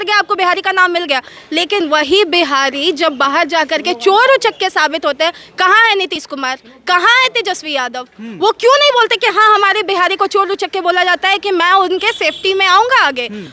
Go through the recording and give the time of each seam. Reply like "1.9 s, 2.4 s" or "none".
none